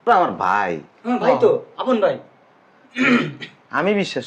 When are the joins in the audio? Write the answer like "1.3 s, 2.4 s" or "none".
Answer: none

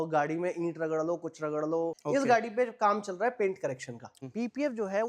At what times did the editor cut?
2.0 s, 4.1 s

